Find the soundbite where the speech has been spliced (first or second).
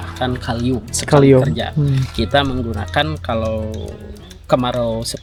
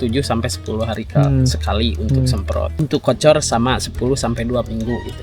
second